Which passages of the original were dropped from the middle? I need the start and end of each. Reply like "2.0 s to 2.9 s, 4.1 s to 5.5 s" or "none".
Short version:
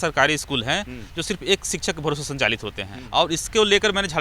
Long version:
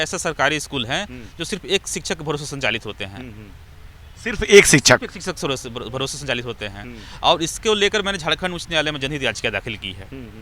3.1 s to 7.0 s